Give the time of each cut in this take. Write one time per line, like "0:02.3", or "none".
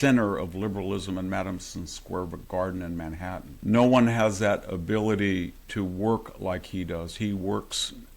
0:03.5
0:05.6